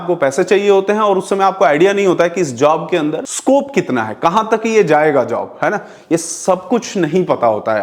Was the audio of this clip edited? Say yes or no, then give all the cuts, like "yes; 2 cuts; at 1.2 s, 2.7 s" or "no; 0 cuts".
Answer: no; 0 cuts